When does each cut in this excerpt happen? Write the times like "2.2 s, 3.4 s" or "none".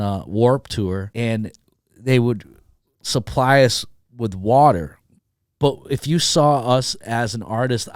1.1 s